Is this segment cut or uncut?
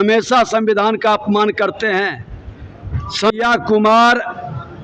cut